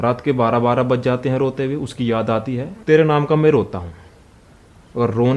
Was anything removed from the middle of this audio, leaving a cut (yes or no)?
yes